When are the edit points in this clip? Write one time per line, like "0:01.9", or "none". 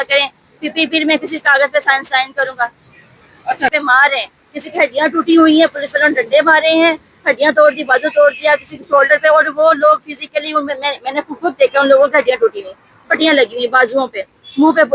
0:03.7